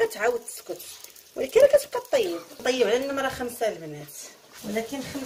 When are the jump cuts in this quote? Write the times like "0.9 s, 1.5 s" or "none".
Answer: 2.6 s